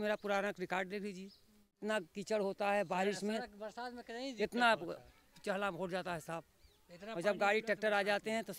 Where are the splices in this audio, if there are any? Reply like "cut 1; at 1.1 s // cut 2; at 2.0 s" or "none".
cut 1; at 1.8 s